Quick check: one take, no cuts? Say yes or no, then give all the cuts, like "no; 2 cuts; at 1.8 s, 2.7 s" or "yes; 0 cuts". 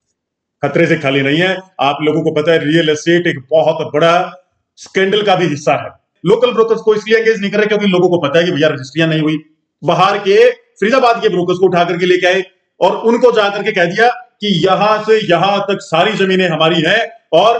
no; 1 cut; at 6.1 s